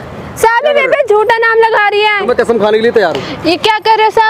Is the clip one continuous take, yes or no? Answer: no